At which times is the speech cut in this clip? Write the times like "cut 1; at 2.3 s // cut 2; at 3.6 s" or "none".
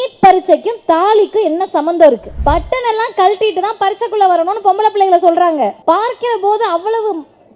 cut 1; at 2.3 s // cut 2; at 5.8 s